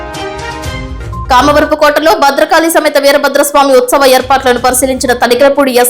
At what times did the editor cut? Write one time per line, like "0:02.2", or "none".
0:01.3